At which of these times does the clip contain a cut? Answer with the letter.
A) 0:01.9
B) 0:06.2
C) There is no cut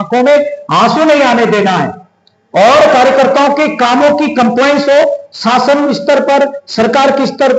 C